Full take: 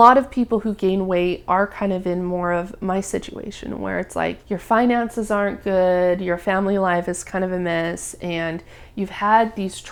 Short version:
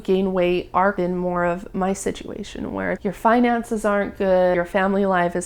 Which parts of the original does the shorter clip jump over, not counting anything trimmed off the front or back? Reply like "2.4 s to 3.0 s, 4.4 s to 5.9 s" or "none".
1.7 s to 2.0 s, 4.1 s to 4.4 s, 6.0 s to 6.3 s